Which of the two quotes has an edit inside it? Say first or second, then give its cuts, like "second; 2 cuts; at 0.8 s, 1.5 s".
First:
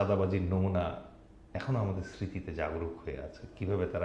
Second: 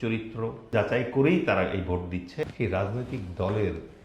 second; 2 cuts; at 0.7 s, 2.4 s